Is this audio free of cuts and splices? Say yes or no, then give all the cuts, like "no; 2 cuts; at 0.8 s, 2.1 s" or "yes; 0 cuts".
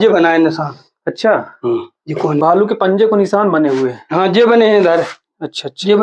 no; 1 cut; at 2.4 s